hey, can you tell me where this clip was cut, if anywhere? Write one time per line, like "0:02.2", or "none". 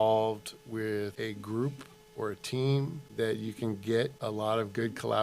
0:01.1
0:03.0
0:04.2